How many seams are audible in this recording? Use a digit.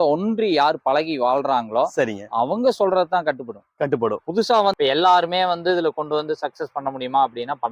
1